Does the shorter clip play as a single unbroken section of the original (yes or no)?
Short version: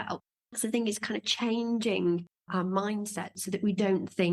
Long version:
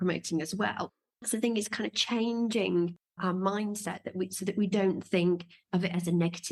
no